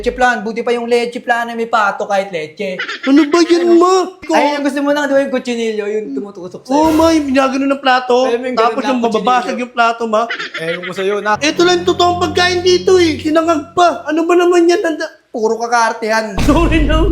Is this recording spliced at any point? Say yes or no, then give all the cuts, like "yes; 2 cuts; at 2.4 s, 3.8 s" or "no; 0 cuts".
yes; 2 cuts; at 4.2 s, 11.4 s